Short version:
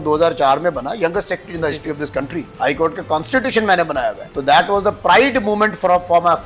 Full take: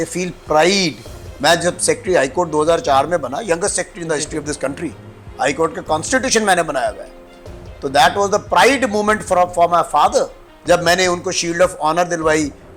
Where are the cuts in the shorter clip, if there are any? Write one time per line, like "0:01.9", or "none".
0:02.5
0:04.3